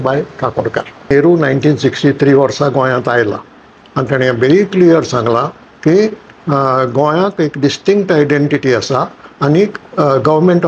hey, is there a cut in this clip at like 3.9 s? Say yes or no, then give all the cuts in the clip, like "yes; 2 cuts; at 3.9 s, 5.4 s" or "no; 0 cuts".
no; 1 cut; at 1.1 s